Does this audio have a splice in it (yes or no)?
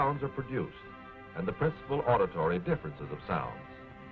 yes